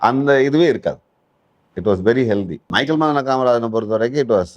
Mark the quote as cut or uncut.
cut